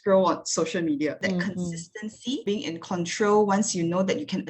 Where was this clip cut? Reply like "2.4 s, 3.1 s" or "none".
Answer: 1.2 s